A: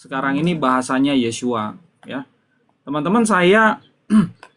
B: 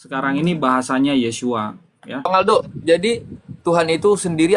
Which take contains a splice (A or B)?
B